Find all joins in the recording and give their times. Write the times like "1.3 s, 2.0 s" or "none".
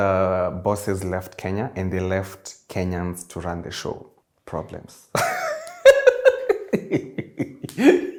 none